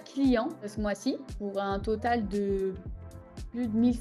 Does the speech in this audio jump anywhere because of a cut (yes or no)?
no